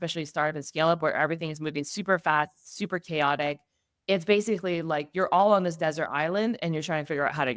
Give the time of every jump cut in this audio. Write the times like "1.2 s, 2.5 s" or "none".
none